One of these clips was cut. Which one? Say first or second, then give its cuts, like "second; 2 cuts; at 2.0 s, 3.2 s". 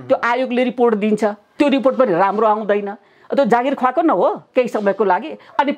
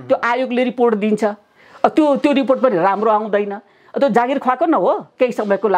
first; 1 cut; at 1.5 s